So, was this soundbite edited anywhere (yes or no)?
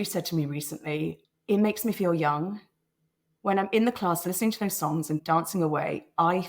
yes